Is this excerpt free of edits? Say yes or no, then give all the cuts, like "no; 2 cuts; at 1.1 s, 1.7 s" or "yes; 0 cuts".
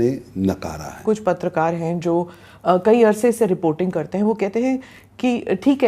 no; 1 cut; at 1.0 s